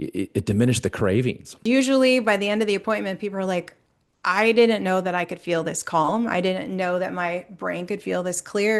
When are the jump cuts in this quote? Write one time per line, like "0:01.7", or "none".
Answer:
0:01.6

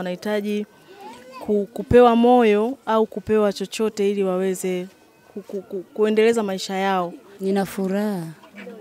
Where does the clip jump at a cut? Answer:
0:07.2

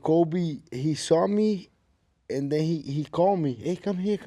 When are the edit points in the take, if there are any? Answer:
none

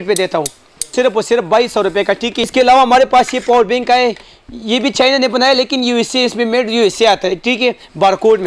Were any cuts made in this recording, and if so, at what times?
0:00.9
0:02.3

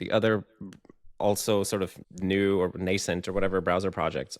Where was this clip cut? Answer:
0:02.0

